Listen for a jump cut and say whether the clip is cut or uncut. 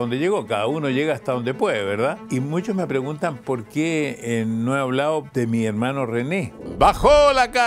cut